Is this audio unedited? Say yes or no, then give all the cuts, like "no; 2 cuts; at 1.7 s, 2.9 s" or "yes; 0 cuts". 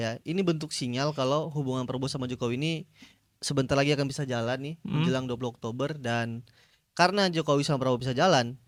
yes; 0 cuts